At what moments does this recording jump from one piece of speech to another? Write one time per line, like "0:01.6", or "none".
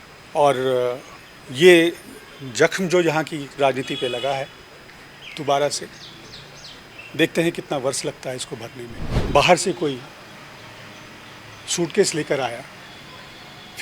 0:09.1